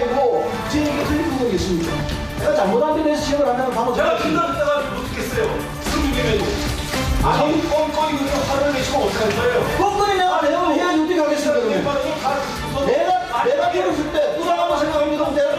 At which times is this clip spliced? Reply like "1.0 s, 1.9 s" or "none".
7.9 s